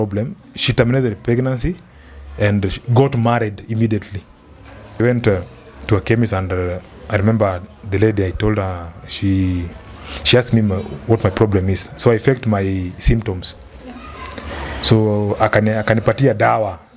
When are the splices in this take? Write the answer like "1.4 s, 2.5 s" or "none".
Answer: 5.0 s

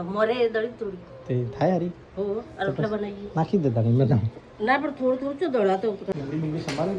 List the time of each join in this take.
6.1 s

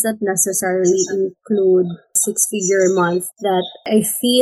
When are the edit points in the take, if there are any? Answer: 3.3 s

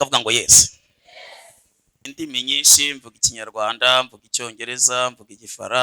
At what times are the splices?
2.1 s

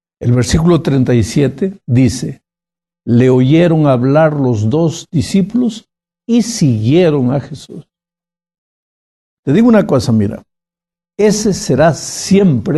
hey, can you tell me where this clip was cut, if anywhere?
9.4 s

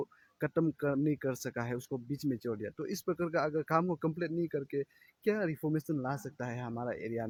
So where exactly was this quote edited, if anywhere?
none

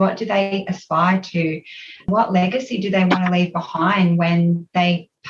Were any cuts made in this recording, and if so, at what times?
2.1 s

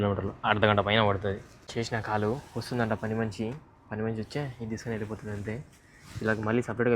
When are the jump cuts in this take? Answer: 1.6 s

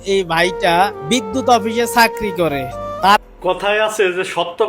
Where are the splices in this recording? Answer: 3.2 s

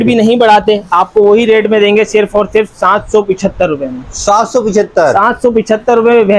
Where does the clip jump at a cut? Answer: none

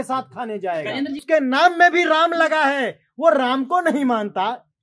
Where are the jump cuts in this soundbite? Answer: 1.2 s

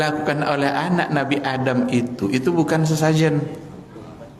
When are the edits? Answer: none

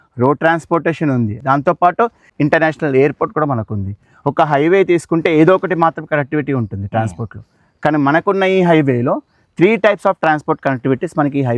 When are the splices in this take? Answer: 1.4 s

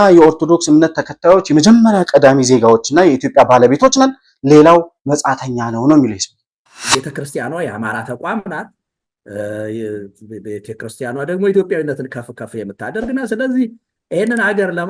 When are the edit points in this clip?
6.8 s

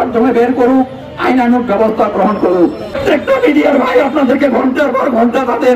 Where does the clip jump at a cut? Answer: 3.0 s

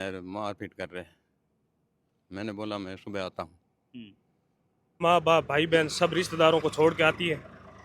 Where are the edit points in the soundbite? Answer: 5.0 s

